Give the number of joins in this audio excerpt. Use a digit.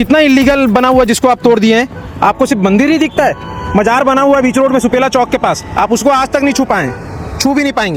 0